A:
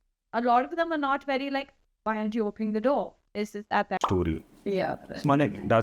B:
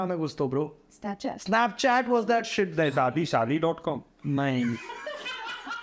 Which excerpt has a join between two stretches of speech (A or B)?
A